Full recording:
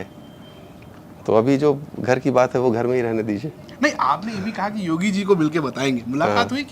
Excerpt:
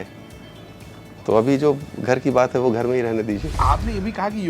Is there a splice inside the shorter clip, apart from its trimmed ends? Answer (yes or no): yes